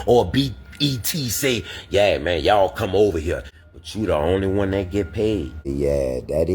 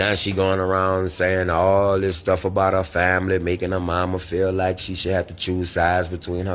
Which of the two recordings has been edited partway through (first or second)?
first